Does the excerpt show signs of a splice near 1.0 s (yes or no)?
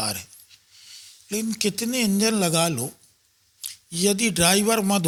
no